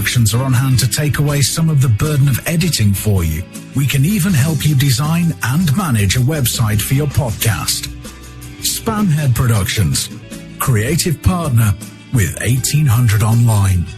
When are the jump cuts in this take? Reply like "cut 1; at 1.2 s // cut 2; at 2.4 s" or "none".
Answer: none